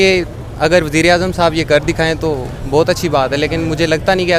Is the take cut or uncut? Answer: uncut